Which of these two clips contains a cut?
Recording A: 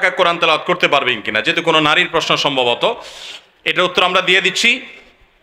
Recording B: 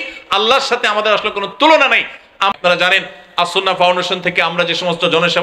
B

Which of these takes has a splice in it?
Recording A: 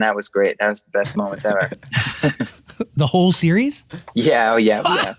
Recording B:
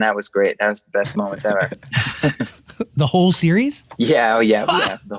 B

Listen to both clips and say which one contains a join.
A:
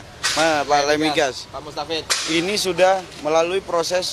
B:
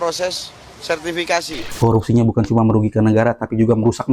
B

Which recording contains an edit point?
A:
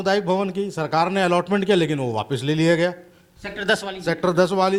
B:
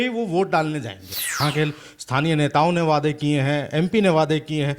B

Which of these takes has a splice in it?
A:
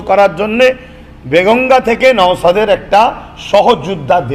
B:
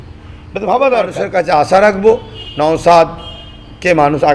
B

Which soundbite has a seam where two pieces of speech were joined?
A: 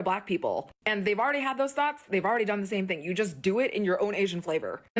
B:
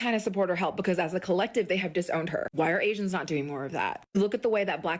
B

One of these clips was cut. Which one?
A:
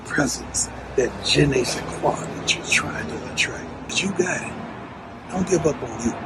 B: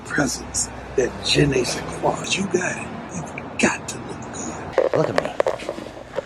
B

